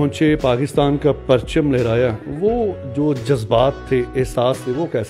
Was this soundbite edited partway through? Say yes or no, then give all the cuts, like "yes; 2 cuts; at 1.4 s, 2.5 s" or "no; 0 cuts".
no; 0 cuts